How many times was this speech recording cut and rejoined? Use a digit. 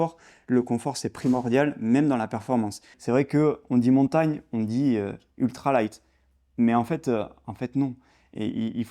1